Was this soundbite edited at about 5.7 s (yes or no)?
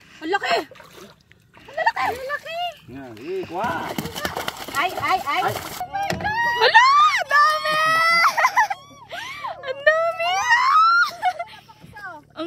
yes